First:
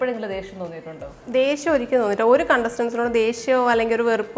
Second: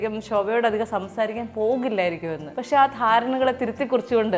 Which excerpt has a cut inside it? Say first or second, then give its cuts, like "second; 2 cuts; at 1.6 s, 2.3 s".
second; 1 cut; at 2.5 s